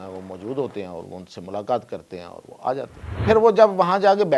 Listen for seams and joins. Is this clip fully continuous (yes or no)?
no